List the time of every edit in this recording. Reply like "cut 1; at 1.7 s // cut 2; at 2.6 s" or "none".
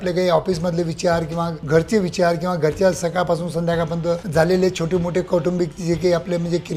none